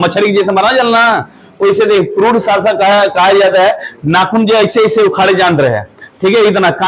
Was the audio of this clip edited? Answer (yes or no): no